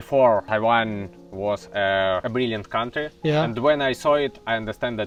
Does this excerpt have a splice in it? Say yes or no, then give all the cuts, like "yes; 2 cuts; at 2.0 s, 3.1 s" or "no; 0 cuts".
no; 0 cuts